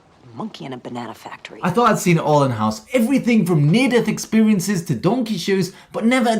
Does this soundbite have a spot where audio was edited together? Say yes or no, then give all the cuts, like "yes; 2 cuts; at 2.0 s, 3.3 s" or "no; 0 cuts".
yes; 1 cut; at 1.5 s